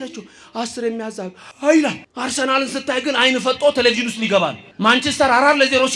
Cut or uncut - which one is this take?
cut